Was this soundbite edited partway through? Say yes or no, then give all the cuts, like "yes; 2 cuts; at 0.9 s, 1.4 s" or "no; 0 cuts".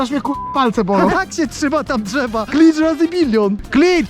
yes; 2 cuts; at 1.1 s, 2.5 s